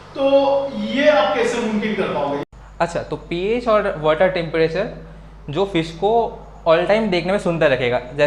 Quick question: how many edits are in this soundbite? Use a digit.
1